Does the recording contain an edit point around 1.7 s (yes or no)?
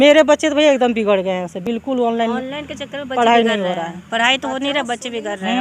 no